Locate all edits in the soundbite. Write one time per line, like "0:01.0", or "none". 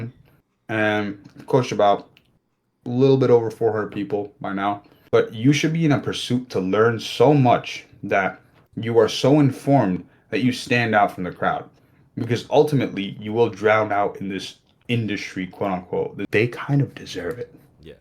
0:04.9
0:16.2